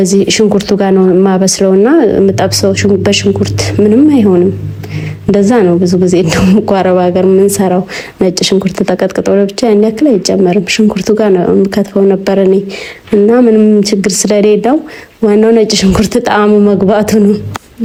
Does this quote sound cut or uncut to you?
uncut